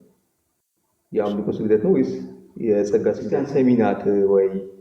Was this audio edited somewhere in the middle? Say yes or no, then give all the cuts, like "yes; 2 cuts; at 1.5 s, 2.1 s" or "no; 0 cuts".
yes; 1 cut; at 3.3 s